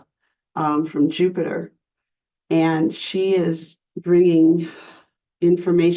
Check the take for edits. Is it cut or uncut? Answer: uncut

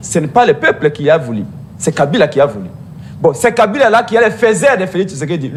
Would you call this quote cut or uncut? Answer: uncut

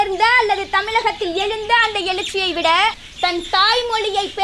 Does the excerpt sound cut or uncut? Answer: cut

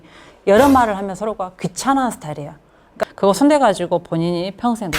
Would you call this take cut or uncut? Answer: cut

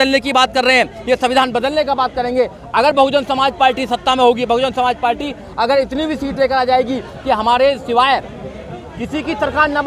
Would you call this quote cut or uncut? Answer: uncut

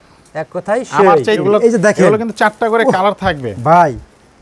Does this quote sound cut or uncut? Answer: cut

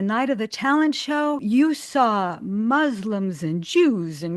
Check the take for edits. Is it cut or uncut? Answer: cut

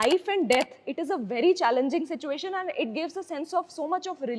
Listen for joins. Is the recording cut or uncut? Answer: uncut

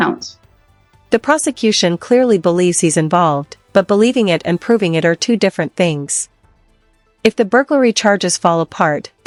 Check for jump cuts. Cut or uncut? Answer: uncut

